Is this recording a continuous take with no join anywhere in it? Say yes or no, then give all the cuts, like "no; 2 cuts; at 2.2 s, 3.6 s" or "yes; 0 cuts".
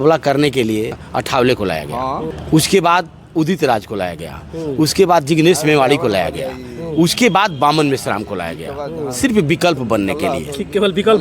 no; 2 cuts; at 1.0 s, 2.3 s